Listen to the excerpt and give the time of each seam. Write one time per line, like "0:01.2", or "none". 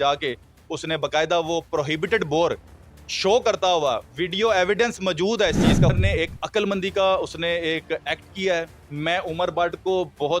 0:05.9